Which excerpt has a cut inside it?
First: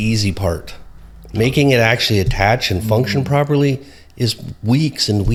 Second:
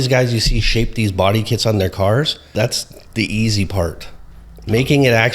second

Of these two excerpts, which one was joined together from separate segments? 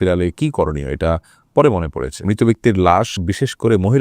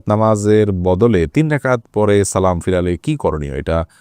first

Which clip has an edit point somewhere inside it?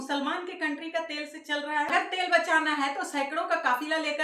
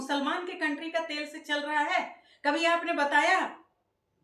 first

